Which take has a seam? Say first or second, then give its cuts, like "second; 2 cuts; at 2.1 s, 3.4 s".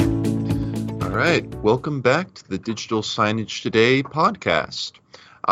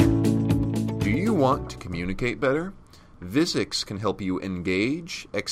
second; 1 cut; at 1.1 s